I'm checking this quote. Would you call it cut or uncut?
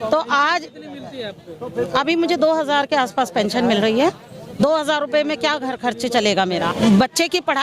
cut